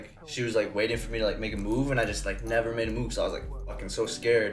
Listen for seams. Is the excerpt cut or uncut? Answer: uncut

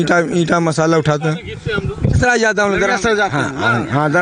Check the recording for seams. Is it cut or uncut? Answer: cut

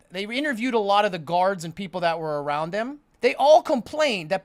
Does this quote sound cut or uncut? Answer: cut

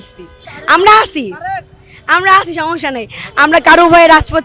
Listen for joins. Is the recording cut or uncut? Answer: uncut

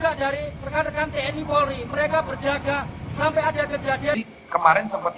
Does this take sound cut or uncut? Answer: cut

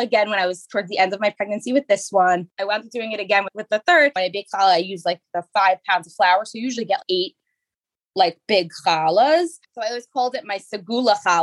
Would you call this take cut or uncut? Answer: cut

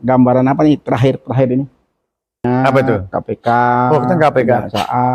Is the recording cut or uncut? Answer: cut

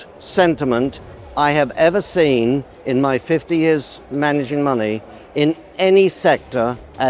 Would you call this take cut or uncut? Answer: uncut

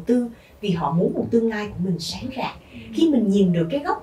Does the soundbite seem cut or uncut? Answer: uncut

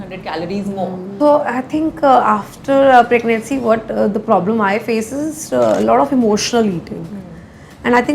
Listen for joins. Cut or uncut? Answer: cut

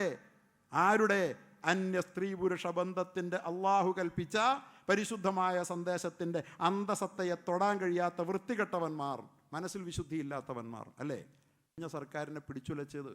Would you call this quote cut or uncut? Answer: cut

